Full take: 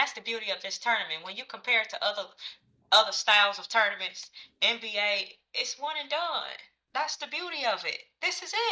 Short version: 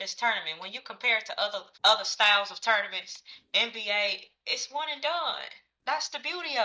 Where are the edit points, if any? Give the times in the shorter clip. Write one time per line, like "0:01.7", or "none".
0:01.7